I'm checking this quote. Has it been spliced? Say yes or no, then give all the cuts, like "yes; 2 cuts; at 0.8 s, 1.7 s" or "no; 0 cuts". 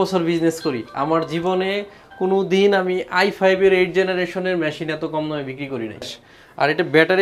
yes; 1 cut; at 6.1 s